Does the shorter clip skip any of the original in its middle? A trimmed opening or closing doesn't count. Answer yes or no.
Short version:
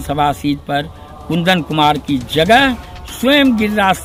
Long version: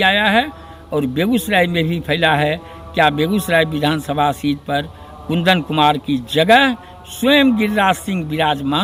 no